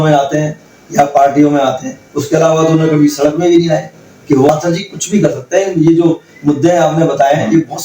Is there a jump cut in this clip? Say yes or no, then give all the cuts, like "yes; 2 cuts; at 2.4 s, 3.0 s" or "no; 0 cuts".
yes; 1 cut; at 4.5 s